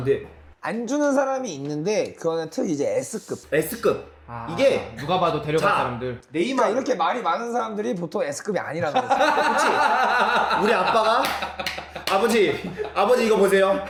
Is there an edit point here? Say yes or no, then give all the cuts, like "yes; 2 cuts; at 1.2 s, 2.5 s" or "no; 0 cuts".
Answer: no; 0 cuts